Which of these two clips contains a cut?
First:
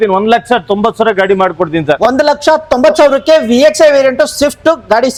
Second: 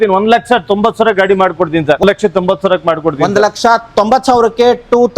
second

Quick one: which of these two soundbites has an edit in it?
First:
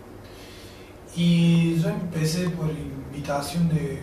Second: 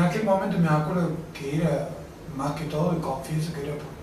second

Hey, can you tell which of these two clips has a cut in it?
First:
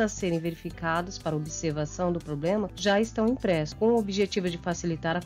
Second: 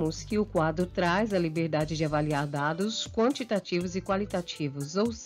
first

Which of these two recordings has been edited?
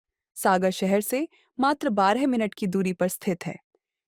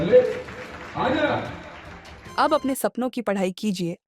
second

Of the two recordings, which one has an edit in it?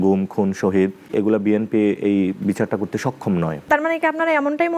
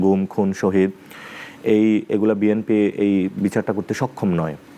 first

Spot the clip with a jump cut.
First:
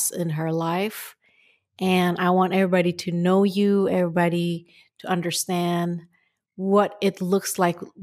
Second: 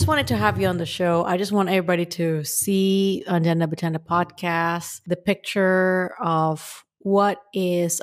second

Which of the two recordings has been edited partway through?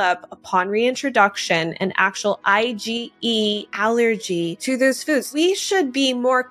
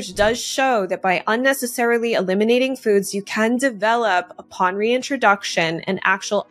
first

